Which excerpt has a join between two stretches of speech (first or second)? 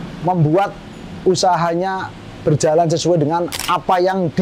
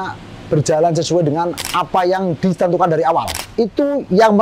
second